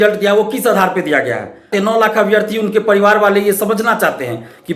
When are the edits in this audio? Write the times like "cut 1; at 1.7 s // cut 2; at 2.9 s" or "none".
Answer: cut 1; at 1.7 s